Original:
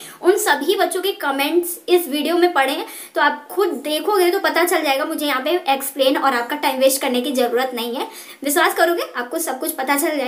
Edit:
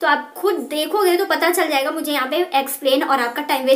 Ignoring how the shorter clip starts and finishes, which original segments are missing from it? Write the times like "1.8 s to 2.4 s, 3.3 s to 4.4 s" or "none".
none